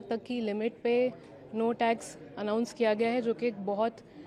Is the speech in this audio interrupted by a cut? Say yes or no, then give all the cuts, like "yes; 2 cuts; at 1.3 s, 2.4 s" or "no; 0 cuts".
no; 0 cuts